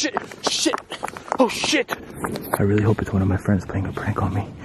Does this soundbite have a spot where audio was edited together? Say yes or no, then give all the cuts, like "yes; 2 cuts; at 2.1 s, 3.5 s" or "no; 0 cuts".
yes; 1 cut; at 2.6 s